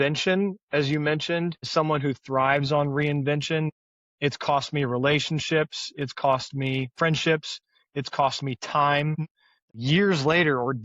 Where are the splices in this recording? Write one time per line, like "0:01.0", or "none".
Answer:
0:09.2